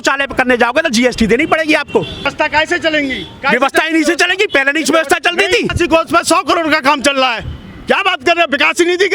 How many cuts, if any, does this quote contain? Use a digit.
2